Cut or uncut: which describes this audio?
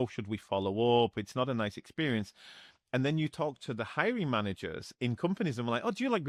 uncut